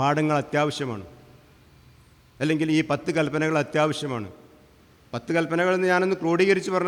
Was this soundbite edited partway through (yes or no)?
no